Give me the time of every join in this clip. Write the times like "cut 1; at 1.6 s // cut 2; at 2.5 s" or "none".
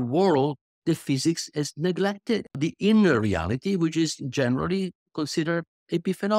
cut 1; at 2.5 s

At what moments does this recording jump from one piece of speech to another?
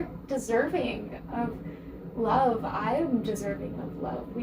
none

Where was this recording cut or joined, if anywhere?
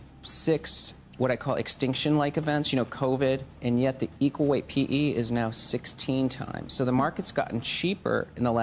cut 1; at 3.6 s

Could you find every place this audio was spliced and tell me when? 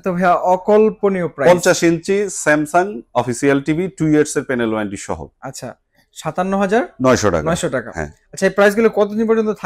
none

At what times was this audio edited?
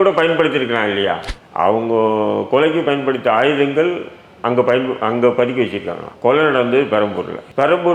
cut 1; at 1.3 s

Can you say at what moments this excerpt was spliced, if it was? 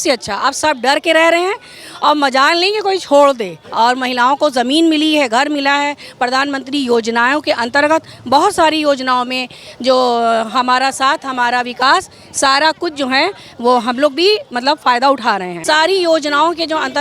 cut 1; at 3.6 s // cut 2; at 15.5 s

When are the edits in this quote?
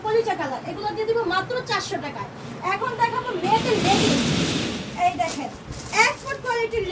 none

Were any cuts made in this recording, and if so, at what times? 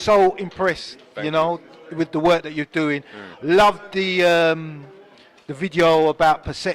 none

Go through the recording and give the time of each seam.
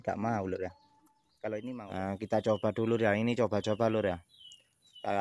cut 1; at 1.8 s

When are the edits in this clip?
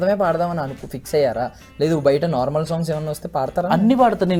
none

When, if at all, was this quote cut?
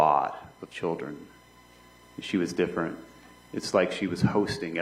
cut 1; at 2.5 s

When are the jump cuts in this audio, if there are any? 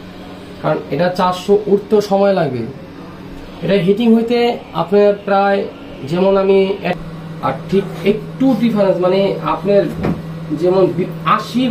cut 1; at 6.9 s

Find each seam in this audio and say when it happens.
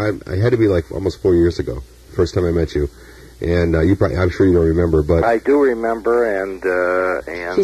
cut 1; at 2.2 s

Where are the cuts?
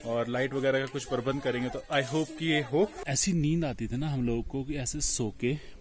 cut 1; at 3.1 s

